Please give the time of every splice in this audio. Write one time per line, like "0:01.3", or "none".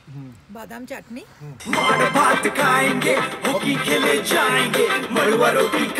0:01.6